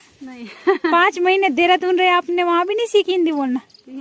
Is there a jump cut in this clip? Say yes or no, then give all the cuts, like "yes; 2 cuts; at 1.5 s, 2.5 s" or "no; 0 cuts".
no; 0 cuts